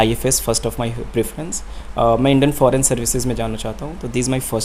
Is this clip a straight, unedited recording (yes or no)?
yes